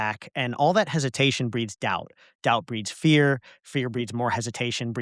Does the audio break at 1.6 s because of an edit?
no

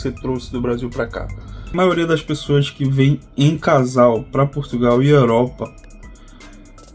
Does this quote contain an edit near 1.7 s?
yes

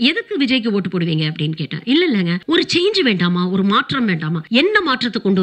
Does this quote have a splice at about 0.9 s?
no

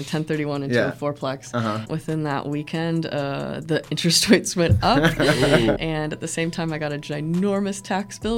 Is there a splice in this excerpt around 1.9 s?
yes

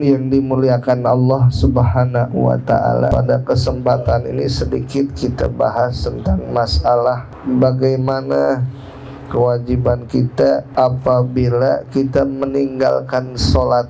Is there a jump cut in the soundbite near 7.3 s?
yes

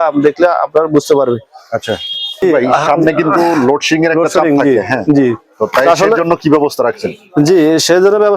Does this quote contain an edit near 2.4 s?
yes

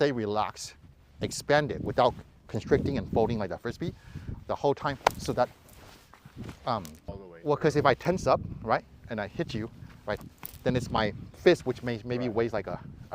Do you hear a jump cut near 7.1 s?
yes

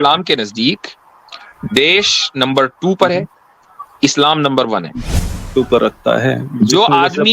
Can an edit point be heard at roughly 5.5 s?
yes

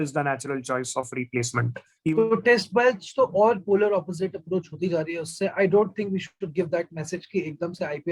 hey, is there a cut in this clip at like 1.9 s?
yes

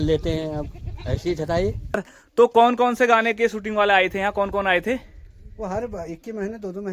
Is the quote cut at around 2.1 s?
yes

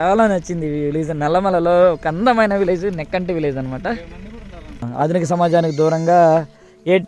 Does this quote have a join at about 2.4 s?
no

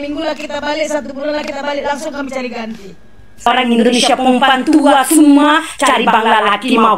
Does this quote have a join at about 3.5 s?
yes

